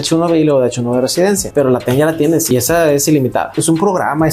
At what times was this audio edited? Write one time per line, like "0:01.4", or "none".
0:01.4
0:02.5
0:03.6